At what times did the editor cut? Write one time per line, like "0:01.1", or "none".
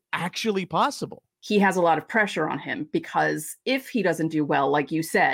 0:01.3